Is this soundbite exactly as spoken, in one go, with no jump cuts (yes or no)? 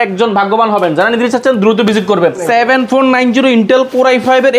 no